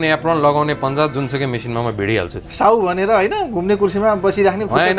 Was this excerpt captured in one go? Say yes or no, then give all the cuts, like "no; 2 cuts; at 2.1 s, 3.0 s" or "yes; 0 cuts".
yes; 0 cuts